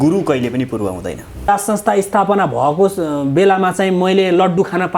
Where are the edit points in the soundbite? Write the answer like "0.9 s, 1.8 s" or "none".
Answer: 1.5 s